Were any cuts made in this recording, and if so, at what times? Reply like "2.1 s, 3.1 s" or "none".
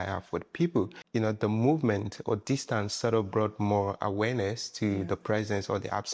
1.0 s